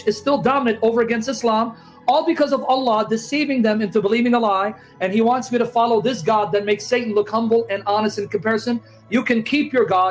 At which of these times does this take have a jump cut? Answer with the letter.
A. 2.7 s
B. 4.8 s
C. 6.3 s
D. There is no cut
D